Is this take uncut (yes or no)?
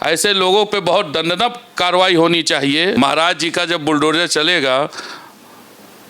no